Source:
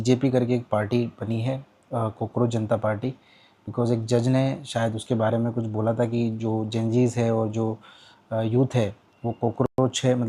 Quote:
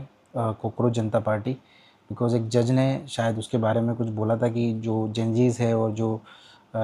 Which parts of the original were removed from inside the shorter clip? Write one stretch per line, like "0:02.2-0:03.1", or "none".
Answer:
none